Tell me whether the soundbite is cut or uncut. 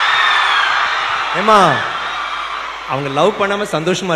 uncut